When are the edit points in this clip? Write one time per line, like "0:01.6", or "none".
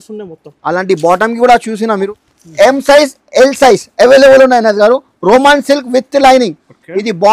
0:02.1